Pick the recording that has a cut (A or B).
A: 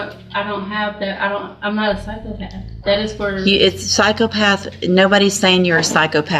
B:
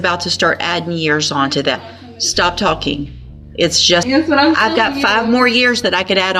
B